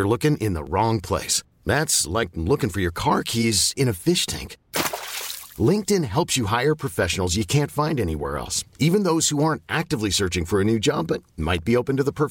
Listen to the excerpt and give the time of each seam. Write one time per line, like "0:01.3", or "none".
none